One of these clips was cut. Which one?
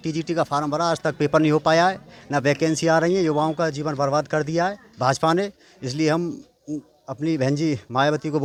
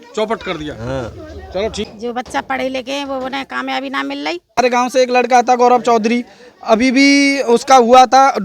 second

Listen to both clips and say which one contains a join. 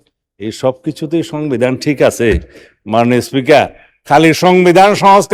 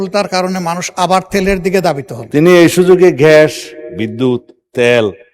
second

